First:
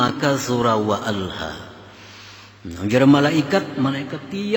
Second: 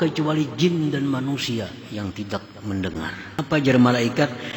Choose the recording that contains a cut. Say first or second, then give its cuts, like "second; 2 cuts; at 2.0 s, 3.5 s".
second; 1 cut; at 3.3 s